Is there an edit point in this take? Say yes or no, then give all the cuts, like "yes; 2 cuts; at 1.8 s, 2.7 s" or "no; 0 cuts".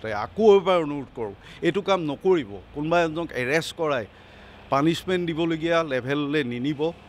no; 0 cuts